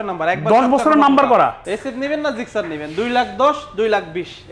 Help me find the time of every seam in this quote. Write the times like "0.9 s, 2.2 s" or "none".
1.7 s